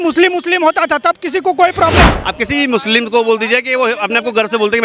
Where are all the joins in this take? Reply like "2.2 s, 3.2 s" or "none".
2.1 s